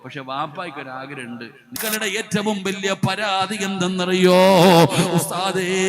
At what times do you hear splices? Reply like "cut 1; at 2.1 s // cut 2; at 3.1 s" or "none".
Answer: cut 1; at 1.8 s